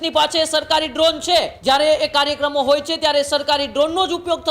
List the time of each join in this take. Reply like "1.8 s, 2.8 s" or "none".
1.5 s